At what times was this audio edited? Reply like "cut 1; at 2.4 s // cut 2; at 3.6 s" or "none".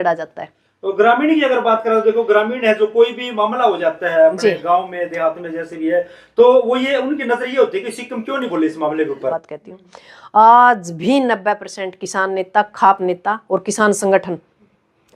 cut 1; at 9.5 s